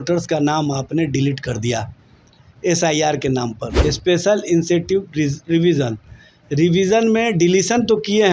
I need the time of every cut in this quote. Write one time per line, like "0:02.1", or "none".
0:03.6